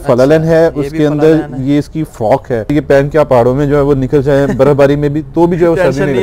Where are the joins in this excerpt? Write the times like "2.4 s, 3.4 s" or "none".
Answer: 2.7 s